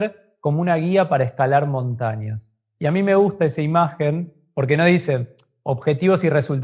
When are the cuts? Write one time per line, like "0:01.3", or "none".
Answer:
none